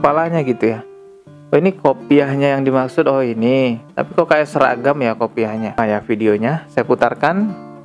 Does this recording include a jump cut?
yes; 1 cut; at 5.8 s

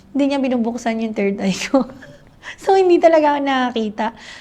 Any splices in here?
no; 0 cuts

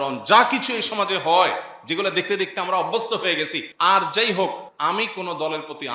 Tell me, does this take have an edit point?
yes; 2 cuts; at 3.6 s, 4.7 s

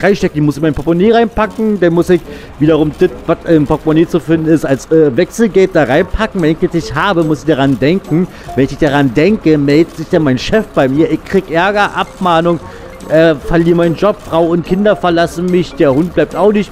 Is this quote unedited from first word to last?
yes; 0 cuts

